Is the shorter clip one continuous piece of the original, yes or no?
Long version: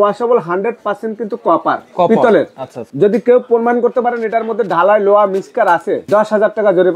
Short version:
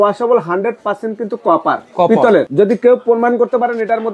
no